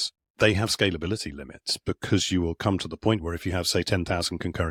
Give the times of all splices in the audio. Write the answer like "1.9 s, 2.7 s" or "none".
none